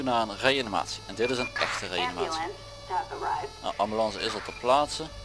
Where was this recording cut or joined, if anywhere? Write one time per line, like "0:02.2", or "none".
none